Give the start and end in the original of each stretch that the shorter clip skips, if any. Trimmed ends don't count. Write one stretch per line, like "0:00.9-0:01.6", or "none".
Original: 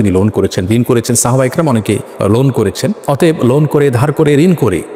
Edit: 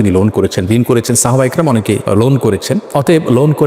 0:02.0-0:02.2